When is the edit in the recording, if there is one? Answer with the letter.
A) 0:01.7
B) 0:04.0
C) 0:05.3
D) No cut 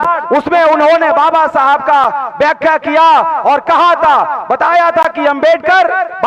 D